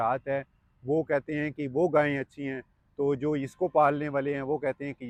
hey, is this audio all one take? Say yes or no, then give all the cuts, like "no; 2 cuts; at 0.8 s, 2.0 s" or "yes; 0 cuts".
yes; 0 cuts